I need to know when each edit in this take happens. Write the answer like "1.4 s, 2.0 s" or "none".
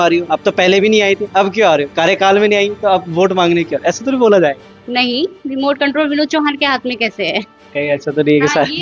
4.7 s